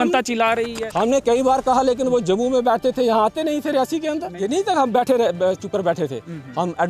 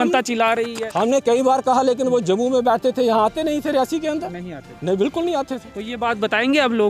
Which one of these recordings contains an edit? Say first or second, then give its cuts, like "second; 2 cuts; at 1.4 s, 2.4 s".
first; 1 cut; at 4.3 s